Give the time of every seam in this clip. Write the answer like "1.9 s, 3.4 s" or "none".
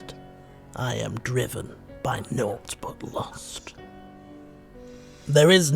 4.3 s

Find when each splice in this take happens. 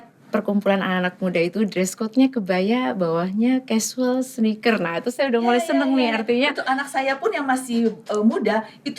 none

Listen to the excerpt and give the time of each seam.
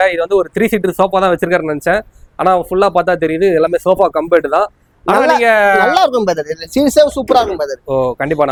none

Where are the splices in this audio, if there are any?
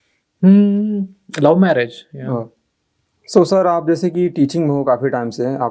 none

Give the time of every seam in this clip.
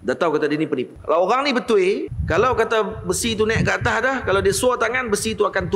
0.9 s, 2.1 s

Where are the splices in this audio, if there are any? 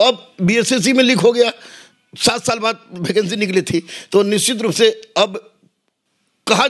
none

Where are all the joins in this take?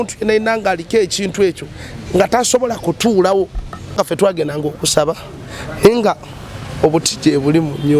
3.9 s

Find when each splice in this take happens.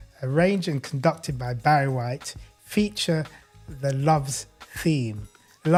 none

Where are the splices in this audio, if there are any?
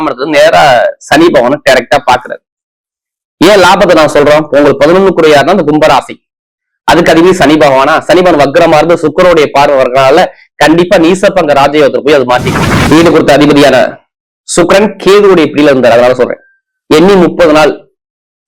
12.8 s

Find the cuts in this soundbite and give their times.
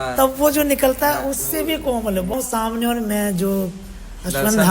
2.3 s

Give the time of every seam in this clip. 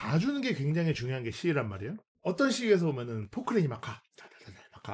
none

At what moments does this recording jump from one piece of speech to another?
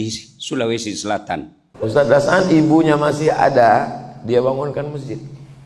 1.6 s

